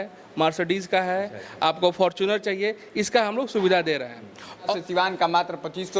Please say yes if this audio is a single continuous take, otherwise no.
no